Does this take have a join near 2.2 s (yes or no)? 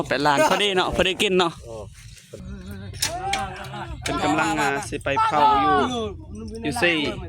yes